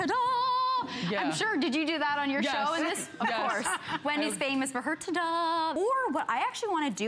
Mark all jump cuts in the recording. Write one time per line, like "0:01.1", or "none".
0:05.8